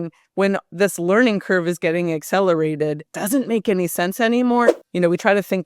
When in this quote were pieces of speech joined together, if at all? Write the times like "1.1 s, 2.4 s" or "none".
3.1 s, 4.7 s